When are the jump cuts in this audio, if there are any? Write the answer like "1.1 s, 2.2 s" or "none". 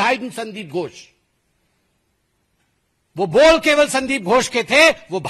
none